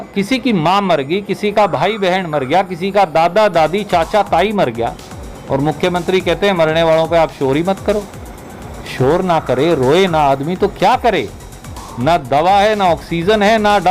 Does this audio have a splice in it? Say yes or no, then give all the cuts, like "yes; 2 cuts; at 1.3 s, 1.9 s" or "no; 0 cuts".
no; 0 cuts